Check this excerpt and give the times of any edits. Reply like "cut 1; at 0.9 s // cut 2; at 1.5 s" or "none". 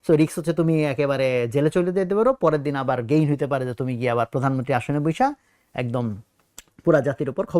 none